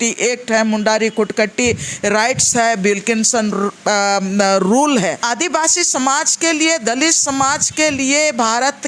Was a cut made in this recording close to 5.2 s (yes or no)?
yes